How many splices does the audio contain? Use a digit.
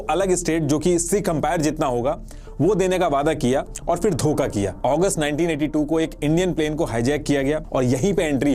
2